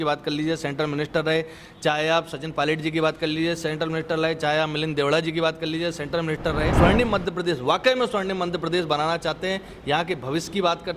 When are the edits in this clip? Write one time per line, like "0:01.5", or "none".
0:06.7